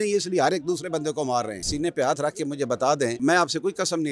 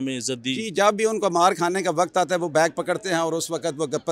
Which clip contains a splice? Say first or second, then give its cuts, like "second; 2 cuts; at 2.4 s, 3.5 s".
first; 1 cut; at 1.7 s